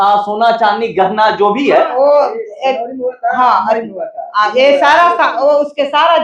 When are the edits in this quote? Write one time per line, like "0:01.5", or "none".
0:01.9